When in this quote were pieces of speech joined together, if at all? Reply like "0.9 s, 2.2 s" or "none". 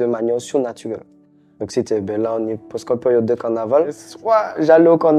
4.0 s